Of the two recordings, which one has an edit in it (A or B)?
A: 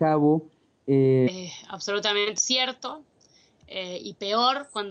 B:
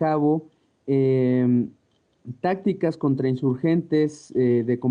B